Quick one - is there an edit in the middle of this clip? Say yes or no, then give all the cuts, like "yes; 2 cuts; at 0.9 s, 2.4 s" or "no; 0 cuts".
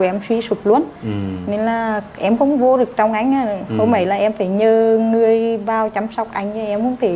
no; 0 cuts